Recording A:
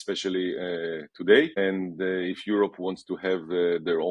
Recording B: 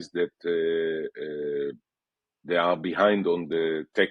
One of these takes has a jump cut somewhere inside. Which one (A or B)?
A